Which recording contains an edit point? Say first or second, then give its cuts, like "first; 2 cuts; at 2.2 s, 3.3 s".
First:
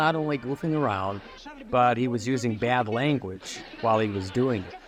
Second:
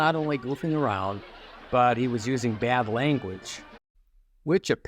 second; 1 cut; at 3.7 s